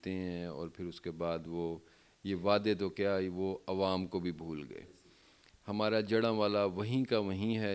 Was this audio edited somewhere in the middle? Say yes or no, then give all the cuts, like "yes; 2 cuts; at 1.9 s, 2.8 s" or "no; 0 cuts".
no; 0 cuts